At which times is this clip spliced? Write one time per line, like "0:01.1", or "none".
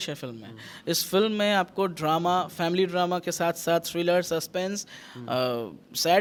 none